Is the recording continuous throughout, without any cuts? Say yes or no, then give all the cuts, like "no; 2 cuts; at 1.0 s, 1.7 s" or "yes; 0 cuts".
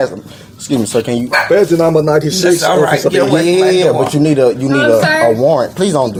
yes; 0 cuts